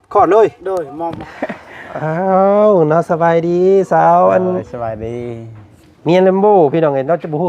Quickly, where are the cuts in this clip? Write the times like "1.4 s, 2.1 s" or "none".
1.3 s